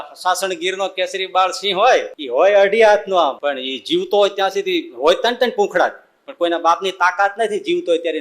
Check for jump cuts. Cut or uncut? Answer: cut